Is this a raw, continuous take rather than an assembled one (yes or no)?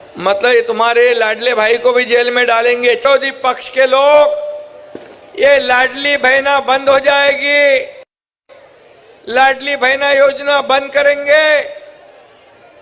no